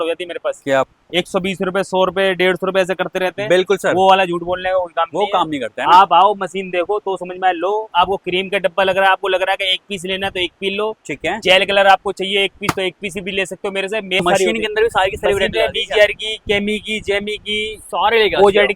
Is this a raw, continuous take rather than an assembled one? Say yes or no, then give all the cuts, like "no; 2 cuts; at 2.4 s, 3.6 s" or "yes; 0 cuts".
no; 2 cuts; at 0.9 s, 14.2 s